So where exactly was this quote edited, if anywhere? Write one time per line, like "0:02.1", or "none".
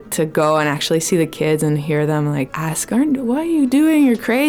0:02.6